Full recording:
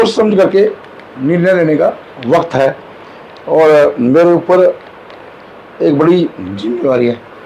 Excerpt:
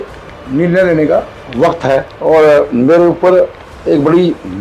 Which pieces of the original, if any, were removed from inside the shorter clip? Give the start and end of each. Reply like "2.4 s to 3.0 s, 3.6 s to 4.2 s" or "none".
2.8 s to 3.4 s, 4.9 s to 5.6 s